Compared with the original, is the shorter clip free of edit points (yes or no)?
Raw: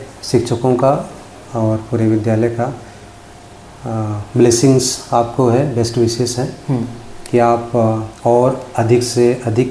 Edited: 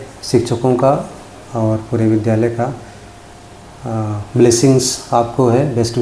yes